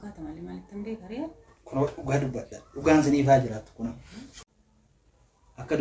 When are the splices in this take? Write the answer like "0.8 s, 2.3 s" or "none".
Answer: 4.3 s